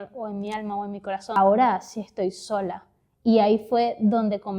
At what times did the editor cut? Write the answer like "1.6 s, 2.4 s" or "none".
1.4 s